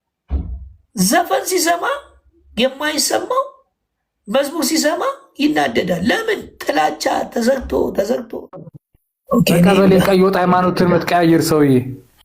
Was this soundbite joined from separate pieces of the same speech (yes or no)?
yes